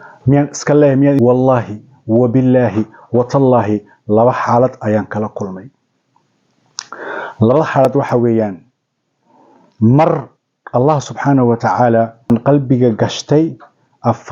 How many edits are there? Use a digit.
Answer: 2